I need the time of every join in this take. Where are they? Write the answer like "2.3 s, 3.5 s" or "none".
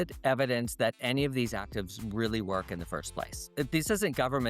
3.5 s